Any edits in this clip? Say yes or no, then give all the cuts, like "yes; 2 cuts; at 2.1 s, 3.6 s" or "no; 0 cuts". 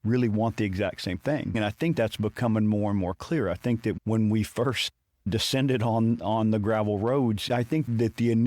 yes; 2 cuts; at 1.6 s, 7.4 s